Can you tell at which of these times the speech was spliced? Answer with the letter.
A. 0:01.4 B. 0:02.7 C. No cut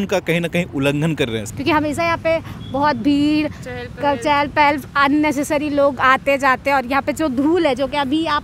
A